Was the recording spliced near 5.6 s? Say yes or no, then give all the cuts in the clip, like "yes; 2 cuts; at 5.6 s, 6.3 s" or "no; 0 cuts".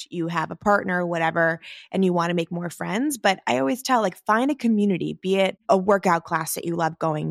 yes; 1 cut; at 5.6 s